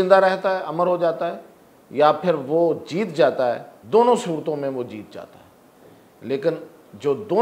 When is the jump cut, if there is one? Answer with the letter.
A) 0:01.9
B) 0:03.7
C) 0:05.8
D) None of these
B